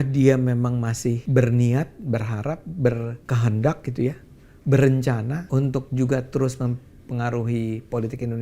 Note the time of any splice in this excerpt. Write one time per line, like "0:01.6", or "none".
0:01.2
0:03.2
0:05.4